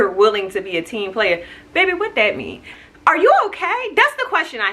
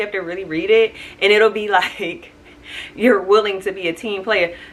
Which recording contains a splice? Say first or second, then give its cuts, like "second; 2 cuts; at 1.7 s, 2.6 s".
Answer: first; 1 cut; at 2.7 s